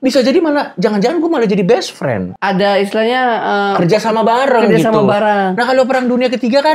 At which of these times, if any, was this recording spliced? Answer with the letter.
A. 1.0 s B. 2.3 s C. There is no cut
B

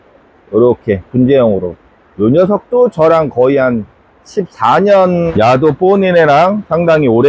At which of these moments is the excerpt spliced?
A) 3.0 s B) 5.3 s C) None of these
B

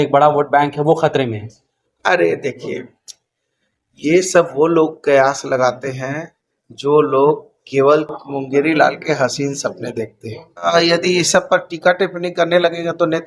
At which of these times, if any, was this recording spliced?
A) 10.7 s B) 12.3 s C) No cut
A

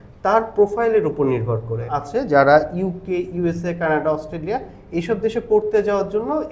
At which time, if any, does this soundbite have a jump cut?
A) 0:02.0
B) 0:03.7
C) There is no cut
A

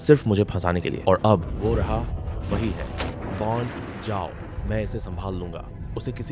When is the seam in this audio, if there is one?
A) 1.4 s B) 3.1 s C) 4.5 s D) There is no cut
B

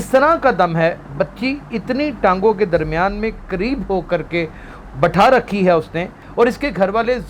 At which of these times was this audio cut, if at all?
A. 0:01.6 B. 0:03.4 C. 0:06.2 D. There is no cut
C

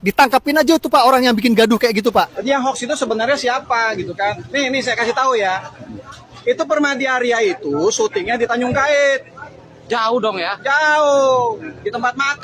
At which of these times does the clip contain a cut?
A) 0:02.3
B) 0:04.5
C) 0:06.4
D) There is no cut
A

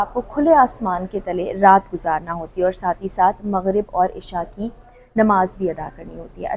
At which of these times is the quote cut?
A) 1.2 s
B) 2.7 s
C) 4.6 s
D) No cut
D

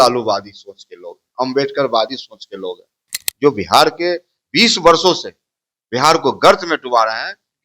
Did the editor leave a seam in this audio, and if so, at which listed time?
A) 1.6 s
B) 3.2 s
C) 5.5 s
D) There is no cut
B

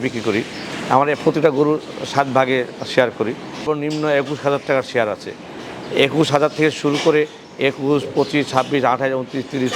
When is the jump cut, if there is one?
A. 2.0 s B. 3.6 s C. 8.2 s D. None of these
B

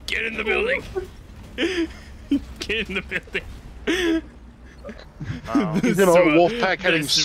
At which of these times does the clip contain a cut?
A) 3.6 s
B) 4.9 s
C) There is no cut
B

